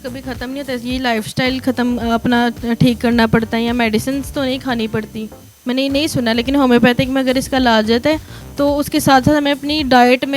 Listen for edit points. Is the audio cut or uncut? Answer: uncut